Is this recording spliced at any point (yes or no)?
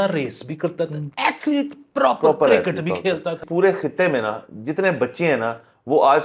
yes